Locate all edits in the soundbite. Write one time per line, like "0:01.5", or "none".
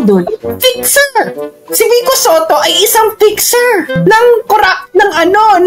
none